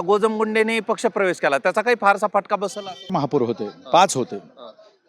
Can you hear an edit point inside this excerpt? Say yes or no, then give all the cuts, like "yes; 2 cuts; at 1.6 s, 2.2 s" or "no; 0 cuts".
yes; 1 cut; at 3.1 s